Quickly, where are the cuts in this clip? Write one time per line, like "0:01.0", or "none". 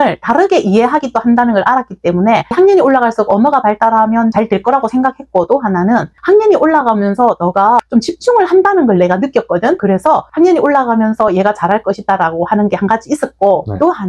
none